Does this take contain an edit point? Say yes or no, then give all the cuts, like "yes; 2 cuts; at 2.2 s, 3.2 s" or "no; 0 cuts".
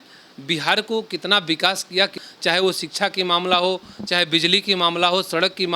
yes; 1 cut; at 2.2 s